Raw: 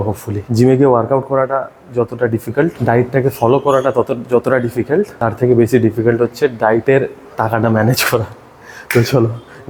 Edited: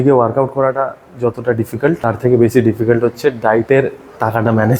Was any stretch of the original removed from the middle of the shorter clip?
yes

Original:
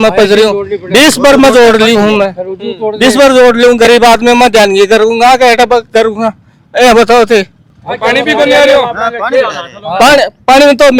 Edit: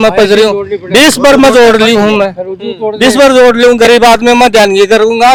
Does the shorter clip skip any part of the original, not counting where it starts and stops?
no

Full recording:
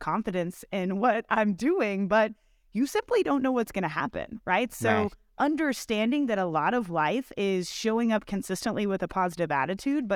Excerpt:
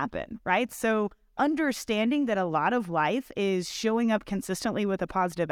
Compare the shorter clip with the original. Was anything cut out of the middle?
no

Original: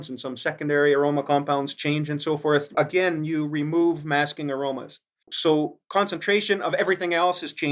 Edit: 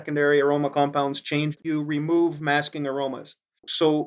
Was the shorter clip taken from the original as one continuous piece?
no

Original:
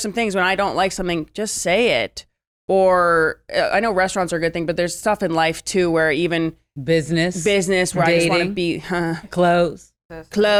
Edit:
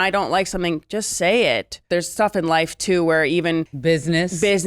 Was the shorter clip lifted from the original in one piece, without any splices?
no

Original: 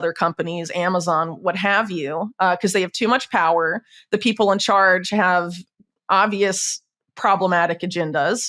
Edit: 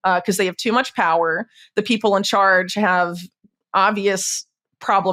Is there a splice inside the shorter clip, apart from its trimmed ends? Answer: no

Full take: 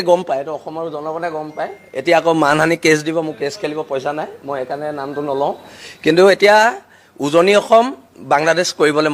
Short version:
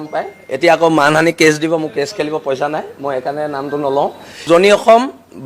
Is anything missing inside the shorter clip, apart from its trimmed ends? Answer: yes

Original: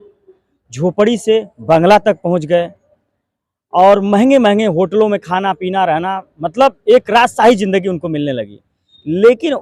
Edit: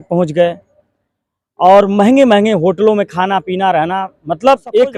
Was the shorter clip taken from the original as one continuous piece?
yes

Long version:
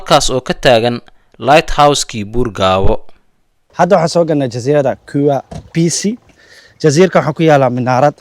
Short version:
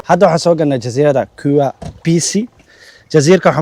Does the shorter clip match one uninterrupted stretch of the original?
yes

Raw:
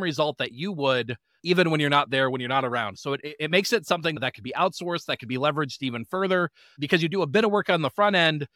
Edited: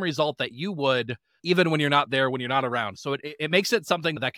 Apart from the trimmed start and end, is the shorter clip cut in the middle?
no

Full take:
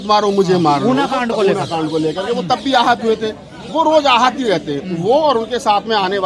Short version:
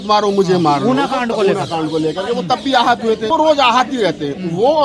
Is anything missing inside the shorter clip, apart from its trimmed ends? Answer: yes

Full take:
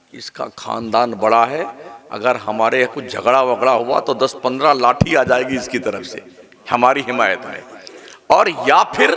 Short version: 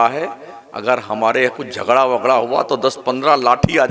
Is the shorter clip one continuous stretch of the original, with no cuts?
yes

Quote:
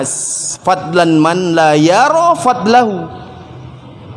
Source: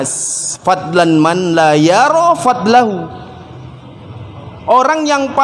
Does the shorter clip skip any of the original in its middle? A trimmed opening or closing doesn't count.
no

